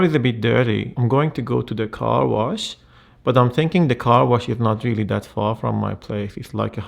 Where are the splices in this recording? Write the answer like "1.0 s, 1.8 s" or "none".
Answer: 0.9 s